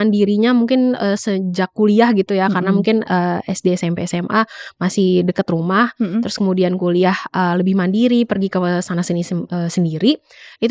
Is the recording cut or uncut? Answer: uncut